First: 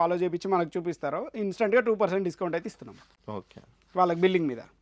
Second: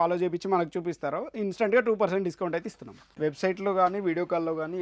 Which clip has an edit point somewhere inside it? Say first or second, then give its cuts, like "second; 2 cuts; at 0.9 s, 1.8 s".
second; 1 cut; at 3.0 s